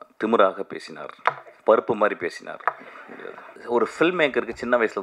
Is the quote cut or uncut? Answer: cut